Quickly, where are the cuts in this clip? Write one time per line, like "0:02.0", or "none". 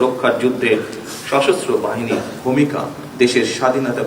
0:02.3
0:03.0